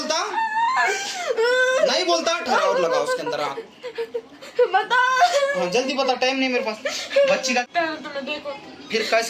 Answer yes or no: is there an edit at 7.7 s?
yes